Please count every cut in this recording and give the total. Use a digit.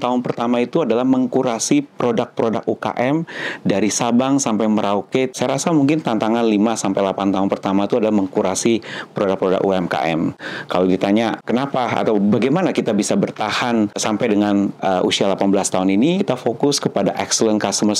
3